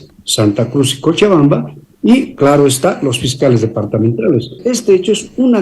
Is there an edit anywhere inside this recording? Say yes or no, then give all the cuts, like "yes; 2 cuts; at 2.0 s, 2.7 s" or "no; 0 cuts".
yes; 1 cut; at 4.6 s